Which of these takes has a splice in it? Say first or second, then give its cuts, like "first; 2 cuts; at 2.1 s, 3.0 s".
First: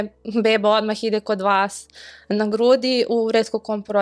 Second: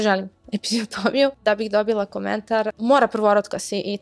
second; 2 cuts; at 1.4 s, 2.7 s